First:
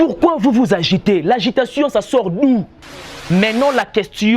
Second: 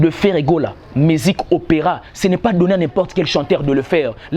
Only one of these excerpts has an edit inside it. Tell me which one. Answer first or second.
first